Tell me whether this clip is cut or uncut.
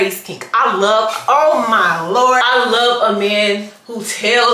cut